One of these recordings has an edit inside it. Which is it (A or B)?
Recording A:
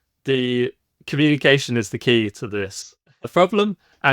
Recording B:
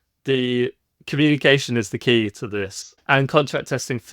B